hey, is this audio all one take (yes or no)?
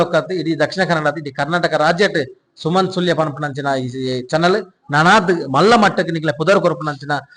yes